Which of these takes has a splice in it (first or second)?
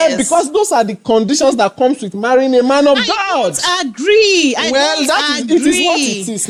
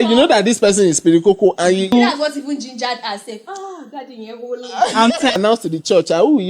second